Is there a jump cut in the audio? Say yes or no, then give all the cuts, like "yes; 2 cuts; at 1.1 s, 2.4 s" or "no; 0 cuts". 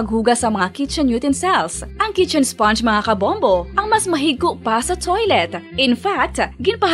no; 0 cuts